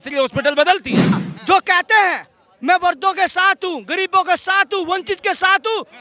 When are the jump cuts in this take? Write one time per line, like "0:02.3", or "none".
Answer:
0:01.3